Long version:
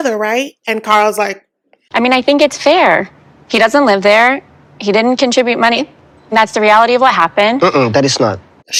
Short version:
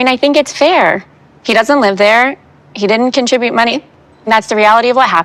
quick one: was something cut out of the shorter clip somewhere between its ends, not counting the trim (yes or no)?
no